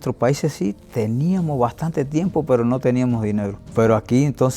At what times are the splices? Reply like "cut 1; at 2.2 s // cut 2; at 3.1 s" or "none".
cut 1; at 3.6 s